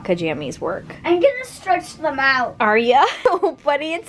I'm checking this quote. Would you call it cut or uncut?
cut